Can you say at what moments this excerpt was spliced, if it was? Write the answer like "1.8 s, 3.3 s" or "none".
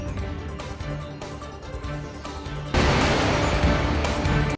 2.7 s